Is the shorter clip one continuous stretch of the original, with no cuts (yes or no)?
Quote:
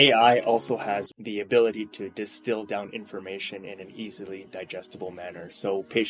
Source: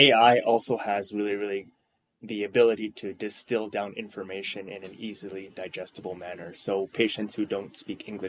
no